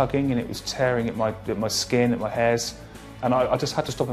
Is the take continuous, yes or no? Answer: yes